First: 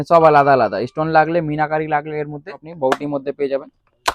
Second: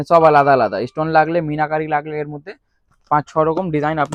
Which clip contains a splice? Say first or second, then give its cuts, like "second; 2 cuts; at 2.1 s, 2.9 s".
first; 1 cut; at 2.7 s